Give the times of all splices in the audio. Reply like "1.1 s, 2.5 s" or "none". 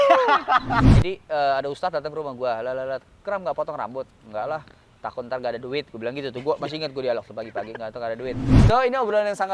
0.9 s, 8.5 s